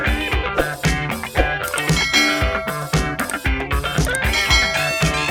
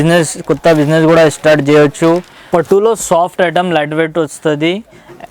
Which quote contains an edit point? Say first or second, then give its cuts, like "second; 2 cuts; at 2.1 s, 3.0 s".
second; 1 cut; at 2.3 s